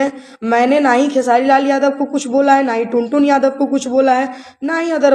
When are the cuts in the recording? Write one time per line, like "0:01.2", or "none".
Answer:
none